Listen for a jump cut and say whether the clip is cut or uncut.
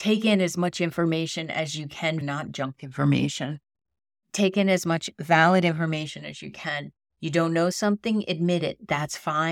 cut